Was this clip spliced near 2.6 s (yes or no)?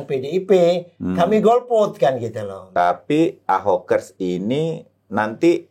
yes